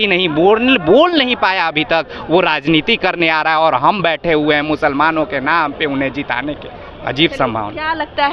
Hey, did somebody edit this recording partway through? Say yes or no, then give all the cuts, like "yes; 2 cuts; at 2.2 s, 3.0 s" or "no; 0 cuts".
no; 0 cuts